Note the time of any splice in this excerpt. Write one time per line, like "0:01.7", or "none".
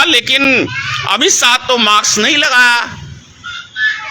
none